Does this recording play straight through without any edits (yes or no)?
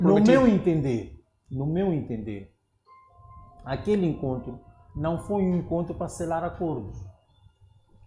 yes